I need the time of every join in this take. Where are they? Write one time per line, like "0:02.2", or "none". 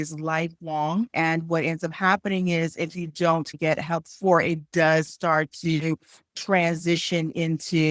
0:01.1
0:03.5